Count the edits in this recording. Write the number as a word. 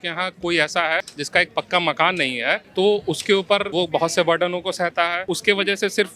four